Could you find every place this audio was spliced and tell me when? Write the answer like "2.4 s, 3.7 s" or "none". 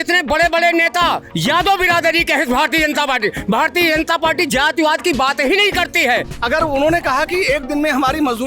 6.3 s